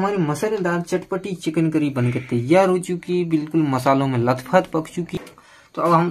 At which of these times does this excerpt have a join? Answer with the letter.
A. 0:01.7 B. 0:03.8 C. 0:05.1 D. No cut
C